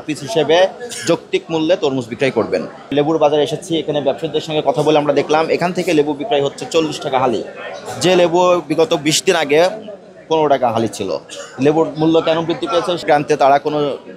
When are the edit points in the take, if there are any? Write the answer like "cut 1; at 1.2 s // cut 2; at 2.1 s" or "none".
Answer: cut 1; at 13.0 s